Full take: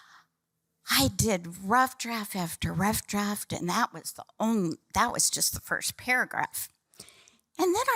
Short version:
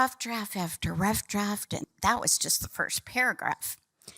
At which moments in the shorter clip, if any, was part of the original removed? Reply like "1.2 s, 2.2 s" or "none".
1.8 s